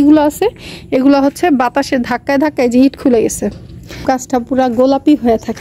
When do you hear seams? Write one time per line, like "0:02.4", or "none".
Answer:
0:04.0